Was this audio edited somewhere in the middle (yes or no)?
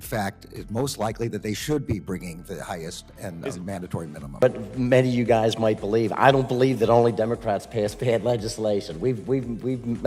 yes